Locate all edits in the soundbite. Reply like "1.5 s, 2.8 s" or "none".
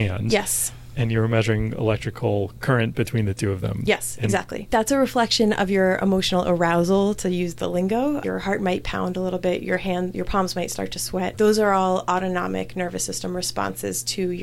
4.5 s, 8.2 s, 11.3 s